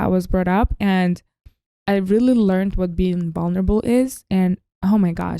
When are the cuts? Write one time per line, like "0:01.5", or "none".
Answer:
0:01.8